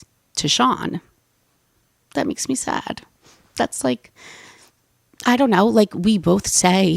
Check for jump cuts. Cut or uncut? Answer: uncut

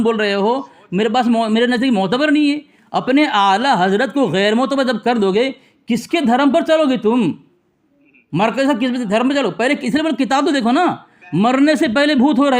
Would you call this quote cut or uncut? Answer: uncut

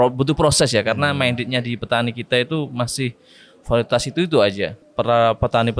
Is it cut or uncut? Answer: cut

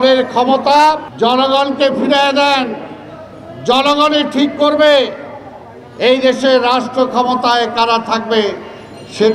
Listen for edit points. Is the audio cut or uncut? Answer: cut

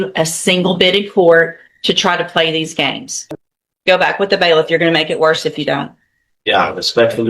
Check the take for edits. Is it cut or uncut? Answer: cut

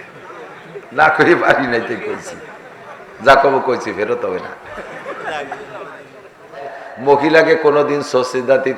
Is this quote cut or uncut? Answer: cut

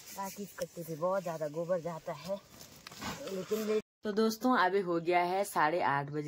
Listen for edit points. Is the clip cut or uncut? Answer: cut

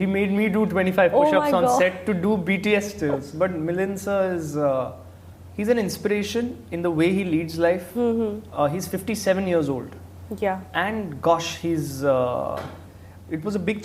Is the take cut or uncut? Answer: uncut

